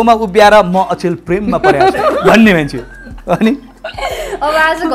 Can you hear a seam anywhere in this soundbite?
no; 0 cuts

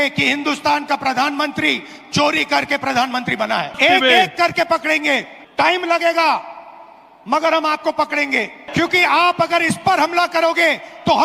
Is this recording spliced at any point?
yes; 3 cuts; at 3.7 s, 5.3 s, 8.7 s

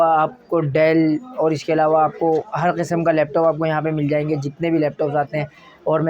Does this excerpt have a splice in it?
no; 0 cuts

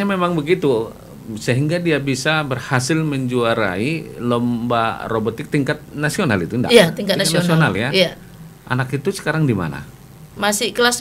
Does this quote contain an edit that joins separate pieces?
no; 0 cuts

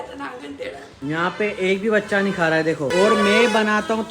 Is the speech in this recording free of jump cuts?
no; 2 cuts; at 1.0 s, 2.9 s

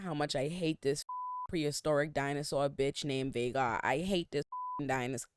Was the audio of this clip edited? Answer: no; 0 cuts

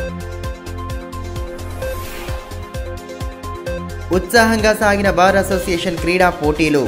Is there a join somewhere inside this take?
no; 0 cuts

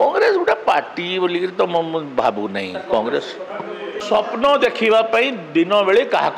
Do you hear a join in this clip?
yes; 1 cut; at 4.0 s

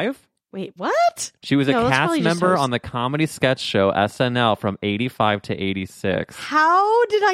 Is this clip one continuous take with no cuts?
no; 1 cut; at 1.3 s

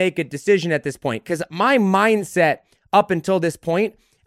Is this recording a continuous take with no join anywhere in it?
yes; 0 cuts

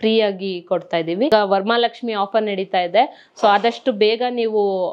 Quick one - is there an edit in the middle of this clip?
yes; 1 cut; at 1.3 s

